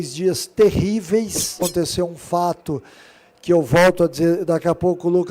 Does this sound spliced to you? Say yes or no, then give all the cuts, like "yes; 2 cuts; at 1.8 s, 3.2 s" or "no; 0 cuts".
yes; 1 cut; at 1.6 s